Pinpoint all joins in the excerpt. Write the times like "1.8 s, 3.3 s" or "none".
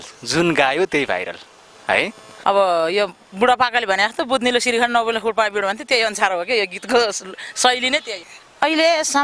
2.3 s, 8.2 s